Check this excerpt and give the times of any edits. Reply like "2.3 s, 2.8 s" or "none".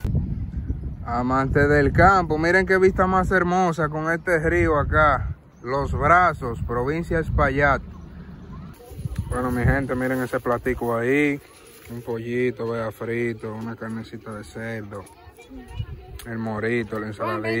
8.9 s